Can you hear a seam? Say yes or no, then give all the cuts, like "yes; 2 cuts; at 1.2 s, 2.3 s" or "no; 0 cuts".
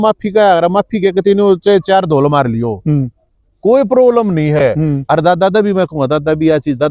no; 0 cuts